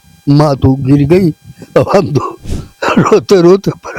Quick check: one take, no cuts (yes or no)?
yes